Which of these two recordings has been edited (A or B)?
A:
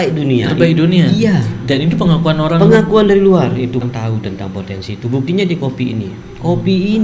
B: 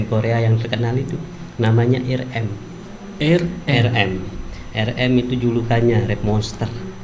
A